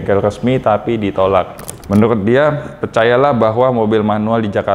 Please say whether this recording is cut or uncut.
cut